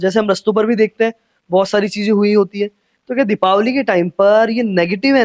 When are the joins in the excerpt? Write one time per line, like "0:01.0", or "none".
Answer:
none